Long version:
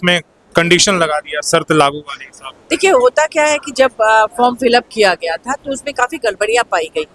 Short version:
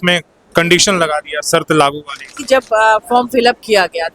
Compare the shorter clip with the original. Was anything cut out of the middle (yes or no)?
yes